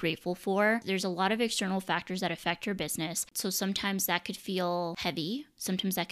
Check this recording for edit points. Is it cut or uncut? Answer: cut